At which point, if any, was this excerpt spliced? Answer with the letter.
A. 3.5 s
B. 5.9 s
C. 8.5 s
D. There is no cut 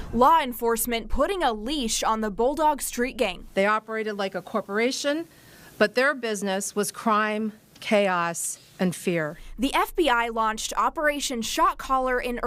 D